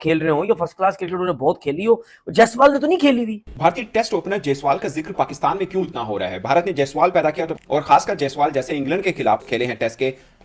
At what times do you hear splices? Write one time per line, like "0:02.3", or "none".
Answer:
0:03.5